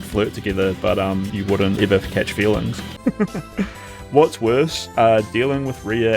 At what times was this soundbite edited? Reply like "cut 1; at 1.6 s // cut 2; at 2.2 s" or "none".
cut 1; at 1.8 s // cut 2; at 2.9 s